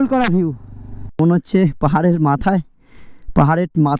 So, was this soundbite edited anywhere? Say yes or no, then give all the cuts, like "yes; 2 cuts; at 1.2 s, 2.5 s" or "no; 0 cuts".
yes; 1 cut; at 1.2 s